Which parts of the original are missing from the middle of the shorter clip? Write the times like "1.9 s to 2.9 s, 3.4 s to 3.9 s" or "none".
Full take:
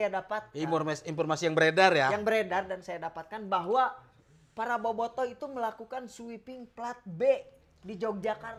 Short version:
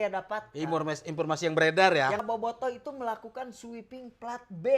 2.2 s to 4.8 s